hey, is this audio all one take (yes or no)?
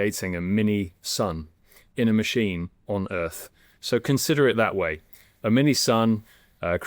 yes